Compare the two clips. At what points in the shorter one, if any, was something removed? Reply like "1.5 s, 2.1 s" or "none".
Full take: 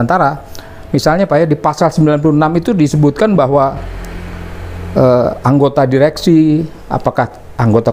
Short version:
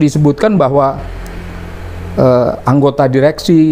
none